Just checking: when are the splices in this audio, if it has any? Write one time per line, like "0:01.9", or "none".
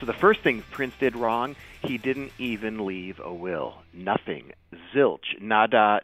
none